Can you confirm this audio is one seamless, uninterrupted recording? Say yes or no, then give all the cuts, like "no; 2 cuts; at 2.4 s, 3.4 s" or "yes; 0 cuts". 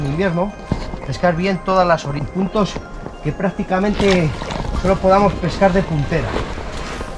no; 1 cut; at 2.2 s